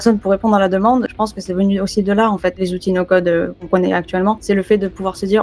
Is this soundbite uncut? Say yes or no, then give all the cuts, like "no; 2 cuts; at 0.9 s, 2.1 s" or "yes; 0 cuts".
no; 4 cuts; at 1.1 s, 2.6 s, 3.7 s, 4.4 s